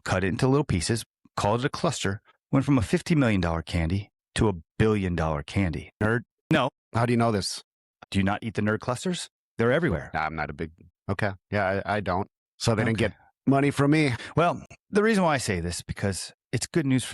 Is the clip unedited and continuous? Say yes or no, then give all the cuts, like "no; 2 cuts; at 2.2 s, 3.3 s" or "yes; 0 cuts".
no; 1 cut; at 7.9 s